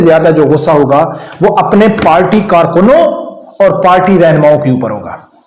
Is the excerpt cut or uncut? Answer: uncut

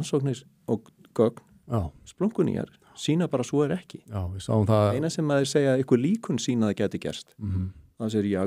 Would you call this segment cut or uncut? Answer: uncut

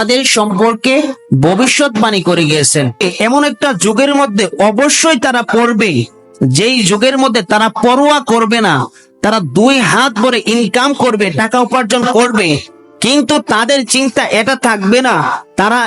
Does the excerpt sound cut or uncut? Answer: cut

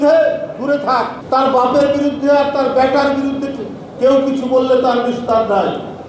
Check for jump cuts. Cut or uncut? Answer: cut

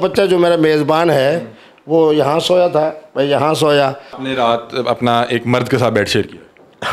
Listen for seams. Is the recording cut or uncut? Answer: cut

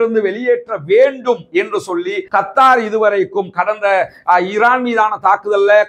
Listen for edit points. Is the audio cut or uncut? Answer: cut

